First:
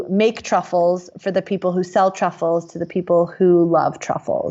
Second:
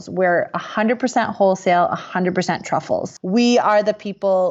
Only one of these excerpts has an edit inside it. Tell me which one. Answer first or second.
second